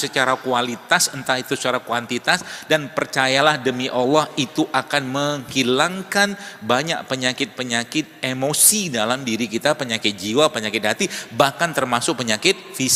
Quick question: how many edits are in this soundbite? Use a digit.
0